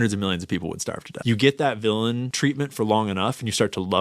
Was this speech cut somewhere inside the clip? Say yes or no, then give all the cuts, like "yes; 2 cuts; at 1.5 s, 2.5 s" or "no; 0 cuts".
yes; 2 cuts; at 1.1 s, 2.3 s